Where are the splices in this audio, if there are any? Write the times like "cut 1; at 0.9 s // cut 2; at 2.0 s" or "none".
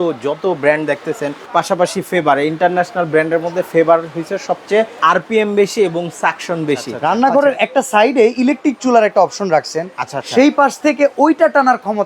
cut 1; at 1.4 s // cut 2; at 5.0 s // cut 3; at 6.9 s